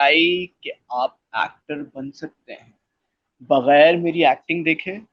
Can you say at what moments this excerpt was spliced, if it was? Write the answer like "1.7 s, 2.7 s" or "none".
none